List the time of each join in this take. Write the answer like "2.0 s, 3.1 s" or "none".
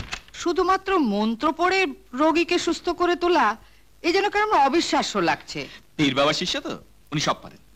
none